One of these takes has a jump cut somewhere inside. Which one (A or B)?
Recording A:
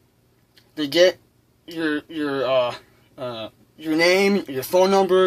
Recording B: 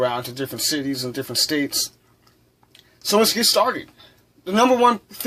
B